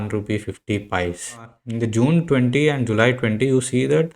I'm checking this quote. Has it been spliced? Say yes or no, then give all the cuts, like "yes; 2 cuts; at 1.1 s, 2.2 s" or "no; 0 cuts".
yes; 1 cut; at 1.6 s